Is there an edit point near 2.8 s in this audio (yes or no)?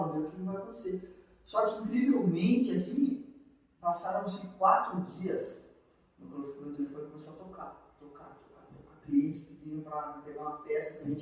no